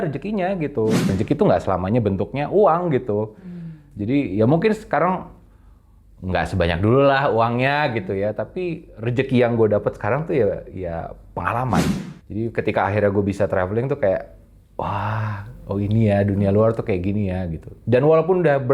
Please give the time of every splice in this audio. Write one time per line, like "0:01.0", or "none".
0:01.1
0:11.9